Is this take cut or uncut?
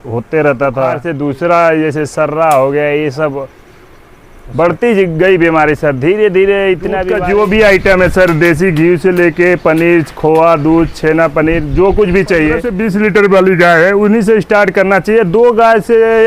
cut